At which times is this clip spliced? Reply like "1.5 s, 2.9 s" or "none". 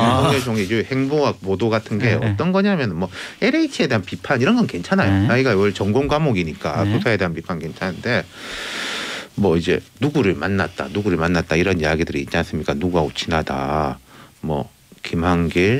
none